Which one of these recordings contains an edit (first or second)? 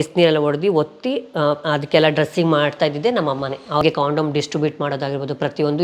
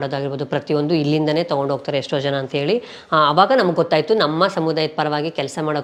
first